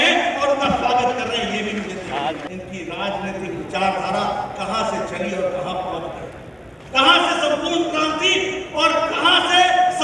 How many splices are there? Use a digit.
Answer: 1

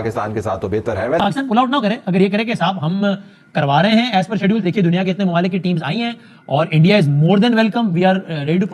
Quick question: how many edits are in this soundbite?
1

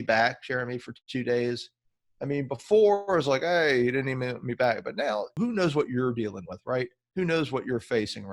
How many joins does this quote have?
1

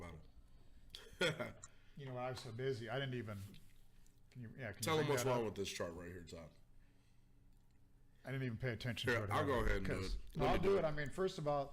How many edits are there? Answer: 1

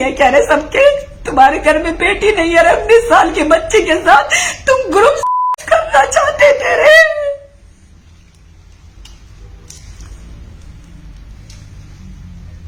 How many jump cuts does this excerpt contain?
0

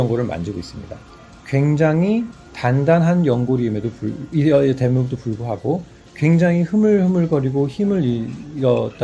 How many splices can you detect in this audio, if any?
0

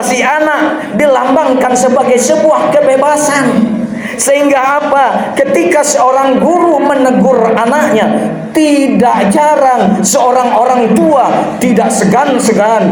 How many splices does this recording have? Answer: 0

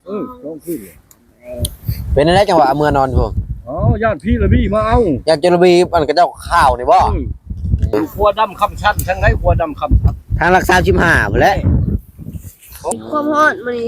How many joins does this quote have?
2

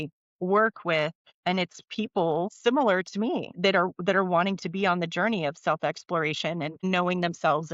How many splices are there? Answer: 4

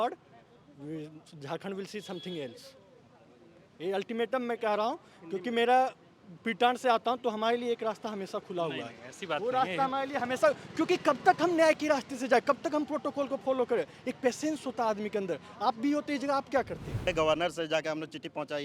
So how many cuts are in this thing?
1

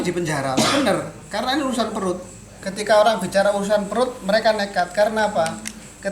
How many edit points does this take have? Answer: 1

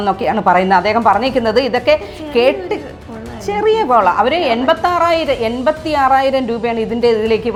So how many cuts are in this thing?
0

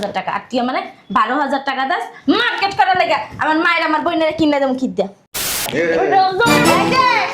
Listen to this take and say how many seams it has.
1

